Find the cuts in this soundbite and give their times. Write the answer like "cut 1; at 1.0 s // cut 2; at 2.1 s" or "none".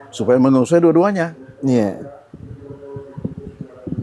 none